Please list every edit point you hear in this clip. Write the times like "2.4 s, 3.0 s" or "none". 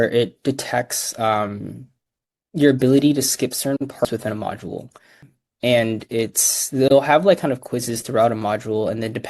4.0 s